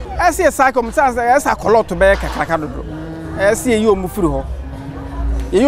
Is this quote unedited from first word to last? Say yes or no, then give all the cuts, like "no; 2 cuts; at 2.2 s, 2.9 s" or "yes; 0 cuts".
no; 1 cut; at 1.2 s